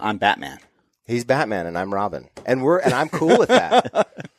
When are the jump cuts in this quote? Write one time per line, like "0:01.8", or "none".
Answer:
none